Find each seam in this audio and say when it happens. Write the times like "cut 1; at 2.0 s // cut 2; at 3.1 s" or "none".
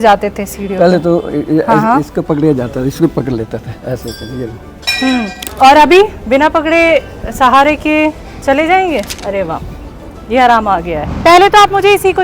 cut 1; at 5.4 s // cut 2; at 9.1 s // cut 3; at 11.0 s